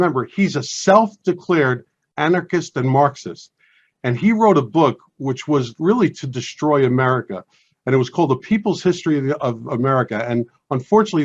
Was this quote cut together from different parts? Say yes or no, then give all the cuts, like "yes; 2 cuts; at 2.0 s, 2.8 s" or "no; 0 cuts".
no; 0 cuts